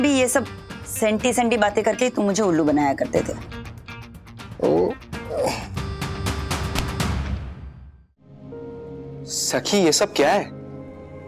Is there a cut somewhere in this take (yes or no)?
yes